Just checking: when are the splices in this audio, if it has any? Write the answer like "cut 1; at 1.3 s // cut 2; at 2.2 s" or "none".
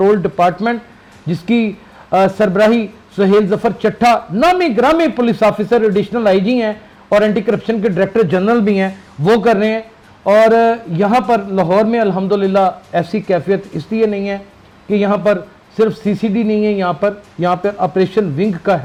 none